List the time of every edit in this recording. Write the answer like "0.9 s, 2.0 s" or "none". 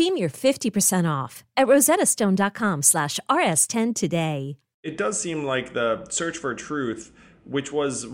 4.9 s

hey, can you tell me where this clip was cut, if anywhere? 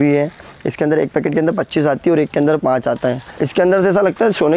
3.3 s

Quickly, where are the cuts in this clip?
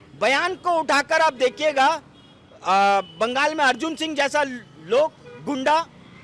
none

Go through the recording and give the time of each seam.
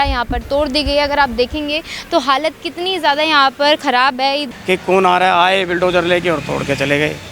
4.5 s

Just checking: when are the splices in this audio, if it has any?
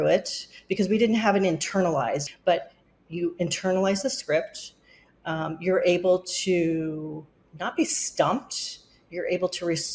2.3 s

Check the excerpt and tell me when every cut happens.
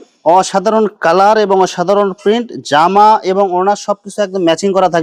none

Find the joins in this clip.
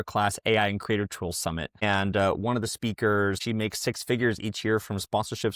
1.8 s, 3.4 s

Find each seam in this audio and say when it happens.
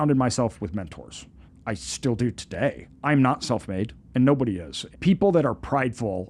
2.9 s, 4.8 s

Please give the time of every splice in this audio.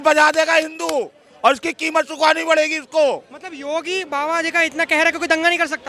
none

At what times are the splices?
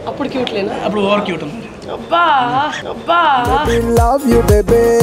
none

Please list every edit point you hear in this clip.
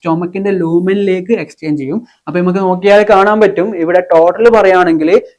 2.2 s

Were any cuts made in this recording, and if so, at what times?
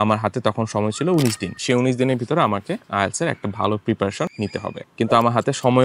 1.5 s, 4.5 s

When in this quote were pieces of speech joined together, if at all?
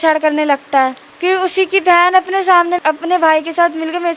1.1 s, 2.8 s

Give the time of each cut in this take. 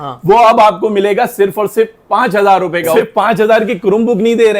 2.9 s

